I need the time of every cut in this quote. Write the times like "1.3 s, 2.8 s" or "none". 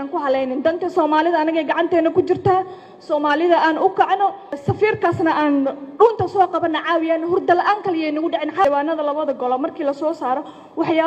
4.6 s, 8.6 s